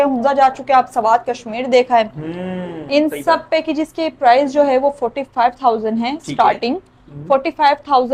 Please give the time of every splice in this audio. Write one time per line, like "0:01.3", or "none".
none